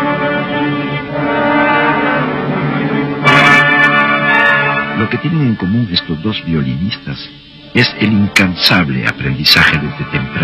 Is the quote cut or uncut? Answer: cut